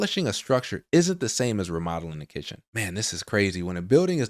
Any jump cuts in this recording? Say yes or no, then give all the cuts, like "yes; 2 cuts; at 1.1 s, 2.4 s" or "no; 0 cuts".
yes; 1 cut; at 2.7 s